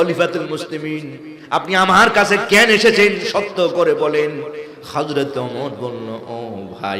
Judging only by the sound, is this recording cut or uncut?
uncut